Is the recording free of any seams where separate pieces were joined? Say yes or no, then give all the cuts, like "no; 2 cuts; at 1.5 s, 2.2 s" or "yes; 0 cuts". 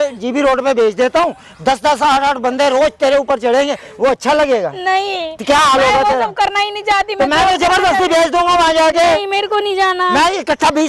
yes; 0 cuts